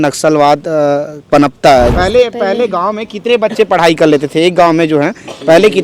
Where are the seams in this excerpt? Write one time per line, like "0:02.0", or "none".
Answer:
0:01.9